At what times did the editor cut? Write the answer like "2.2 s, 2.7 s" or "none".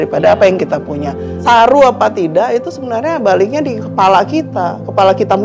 1.4 s